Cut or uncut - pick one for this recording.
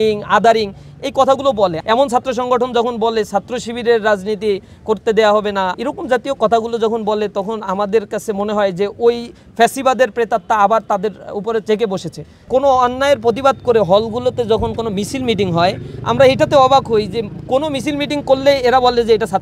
cut